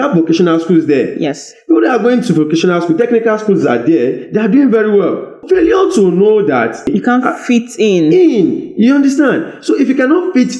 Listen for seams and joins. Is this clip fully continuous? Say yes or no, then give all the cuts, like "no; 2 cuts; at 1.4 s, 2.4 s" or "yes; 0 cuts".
no; 2 cuts; at 5.4 s, 6.9 s